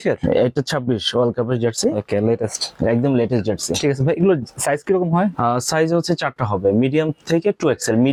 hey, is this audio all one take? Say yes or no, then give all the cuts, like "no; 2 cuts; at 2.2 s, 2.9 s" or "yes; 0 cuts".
yes; 0 cuts